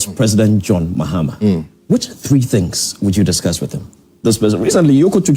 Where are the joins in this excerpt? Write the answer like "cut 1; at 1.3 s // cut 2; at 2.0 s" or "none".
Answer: cut 1; at 4.2 s